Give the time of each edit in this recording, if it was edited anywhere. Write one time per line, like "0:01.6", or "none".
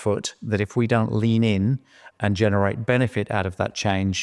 none